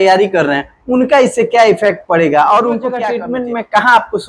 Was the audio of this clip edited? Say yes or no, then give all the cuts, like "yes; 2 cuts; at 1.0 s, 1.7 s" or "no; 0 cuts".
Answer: yes; 1 cut; at 3.0 s